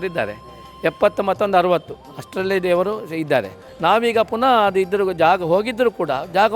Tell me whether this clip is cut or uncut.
cut